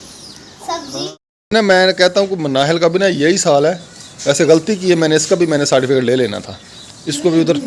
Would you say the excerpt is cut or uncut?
cut